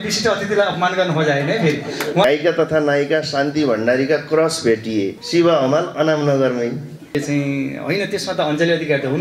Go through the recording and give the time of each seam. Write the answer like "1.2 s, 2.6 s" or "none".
2.2 s, 5.2 s, 7.1 s

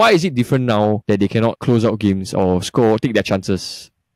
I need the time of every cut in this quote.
1.2 s

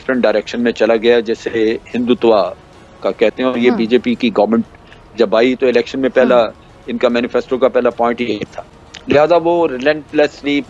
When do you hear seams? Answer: none

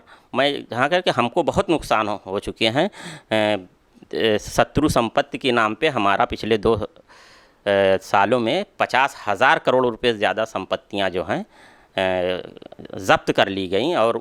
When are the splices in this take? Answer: none

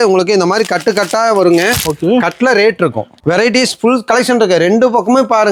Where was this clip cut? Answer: 3.2 s

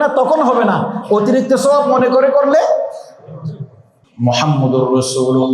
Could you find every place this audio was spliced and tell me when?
3.9 s

